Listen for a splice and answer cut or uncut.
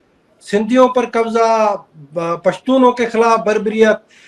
uncut